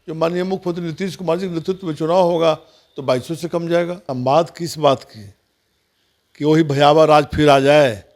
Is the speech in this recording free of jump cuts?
no; 1 cut; at 4.0 s

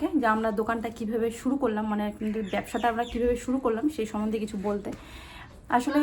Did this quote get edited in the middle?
no; 0 cuts

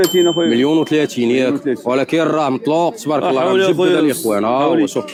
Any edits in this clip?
no; 0 cuts

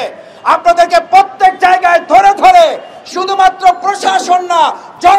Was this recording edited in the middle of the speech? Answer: no; 0 cuts

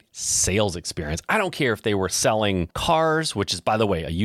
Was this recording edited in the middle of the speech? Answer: yes; 1 cut; at 2.7 s

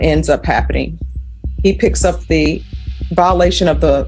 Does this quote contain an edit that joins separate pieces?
yes; 1 cut; at 2.5 s

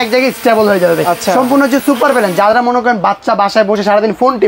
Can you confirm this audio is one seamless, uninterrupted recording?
yes; 0 cuts

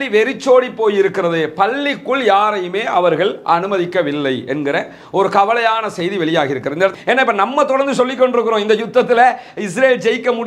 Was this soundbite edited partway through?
yes; 1 cut; at 6.9 s

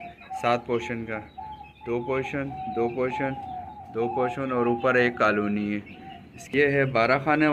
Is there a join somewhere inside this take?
yes; 1 cut; at 6.5 s

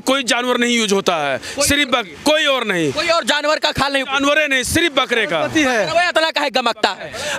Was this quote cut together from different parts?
no; 0 cuts

